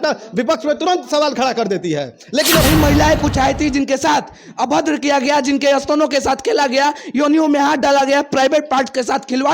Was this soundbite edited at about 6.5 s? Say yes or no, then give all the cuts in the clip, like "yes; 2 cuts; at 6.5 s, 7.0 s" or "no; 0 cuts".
no; 1 cut; at 2.7 s